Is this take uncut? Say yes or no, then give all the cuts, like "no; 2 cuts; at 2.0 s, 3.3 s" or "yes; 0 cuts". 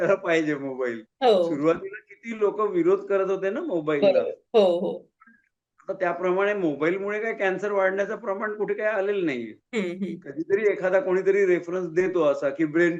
yes; 0 cuts